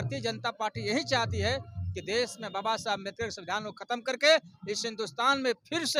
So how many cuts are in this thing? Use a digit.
0